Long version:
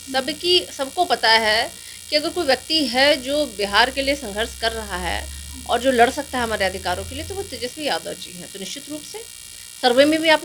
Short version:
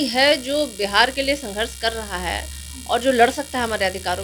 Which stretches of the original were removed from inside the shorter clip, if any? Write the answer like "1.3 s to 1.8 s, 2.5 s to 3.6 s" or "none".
none